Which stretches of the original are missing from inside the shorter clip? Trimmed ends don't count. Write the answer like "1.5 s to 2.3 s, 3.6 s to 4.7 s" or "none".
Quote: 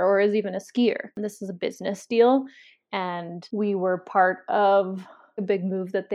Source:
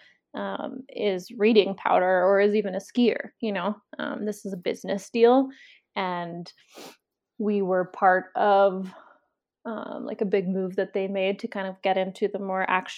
3.3 s to 4.1 s, 6.4 s to 7.2 s, 9.2 s to 10.2 s

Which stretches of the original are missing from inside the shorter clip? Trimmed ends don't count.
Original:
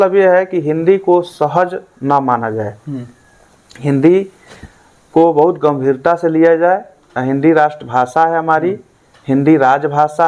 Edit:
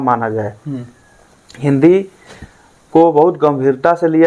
none

